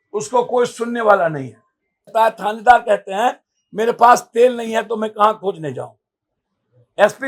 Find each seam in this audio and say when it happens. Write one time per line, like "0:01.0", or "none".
0:02.1